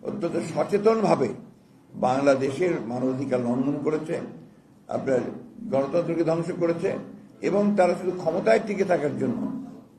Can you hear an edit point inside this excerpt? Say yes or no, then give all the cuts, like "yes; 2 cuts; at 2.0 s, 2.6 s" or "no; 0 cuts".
no; 0 cuts